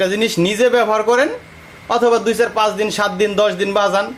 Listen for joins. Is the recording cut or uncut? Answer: uncut